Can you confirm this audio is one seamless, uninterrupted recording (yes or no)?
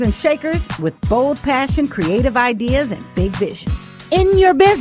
no